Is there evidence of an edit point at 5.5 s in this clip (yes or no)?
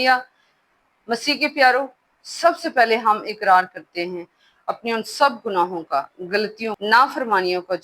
no